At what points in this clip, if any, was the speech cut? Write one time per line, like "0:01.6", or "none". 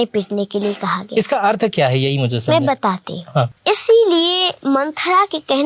0:03.5
0:04.5